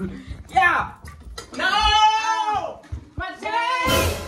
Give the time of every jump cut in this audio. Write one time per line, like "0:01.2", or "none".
none